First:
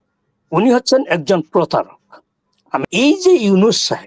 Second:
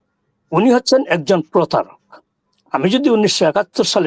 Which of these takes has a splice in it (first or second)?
first